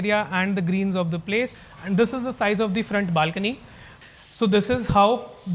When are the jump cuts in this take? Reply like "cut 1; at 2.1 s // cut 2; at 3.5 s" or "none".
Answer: cut 1; at 1.6 s // cut 2; at 3.9 s